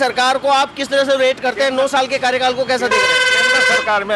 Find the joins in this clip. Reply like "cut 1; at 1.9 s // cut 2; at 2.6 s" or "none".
none